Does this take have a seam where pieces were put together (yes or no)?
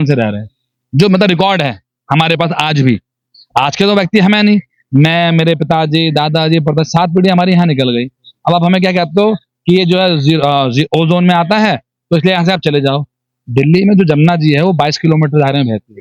no